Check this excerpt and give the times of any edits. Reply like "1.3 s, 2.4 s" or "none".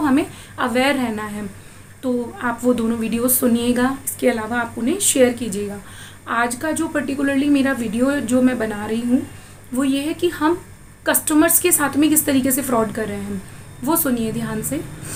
none